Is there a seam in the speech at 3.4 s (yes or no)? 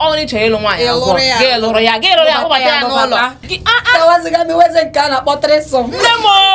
yes